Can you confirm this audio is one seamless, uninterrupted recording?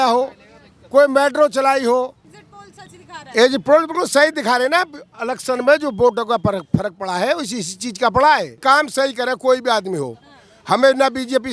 no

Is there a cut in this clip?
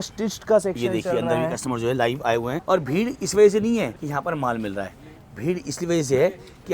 yes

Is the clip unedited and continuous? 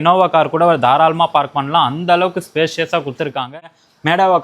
no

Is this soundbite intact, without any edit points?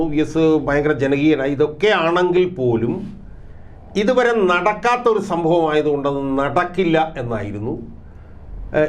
yes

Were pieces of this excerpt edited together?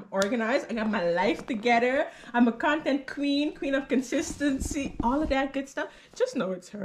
no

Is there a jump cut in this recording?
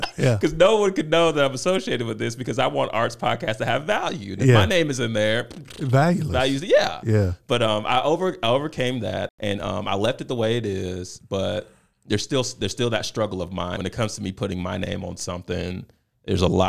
yes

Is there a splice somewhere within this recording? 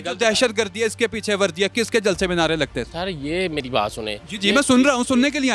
no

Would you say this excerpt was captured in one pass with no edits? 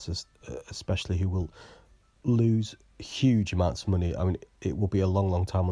yes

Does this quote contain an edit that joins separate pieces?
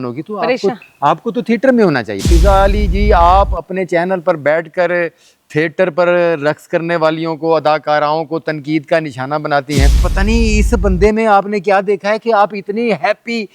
yes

